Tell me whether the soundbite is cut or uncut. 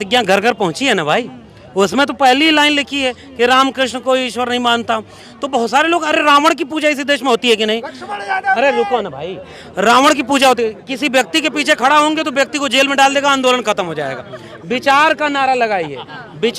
uncut